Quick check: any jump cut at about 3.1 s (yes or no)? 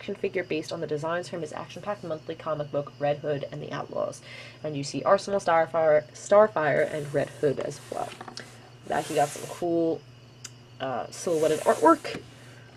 yes